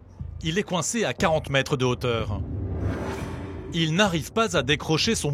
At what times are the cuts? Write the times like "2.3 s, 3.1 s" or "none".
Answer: 3.6 s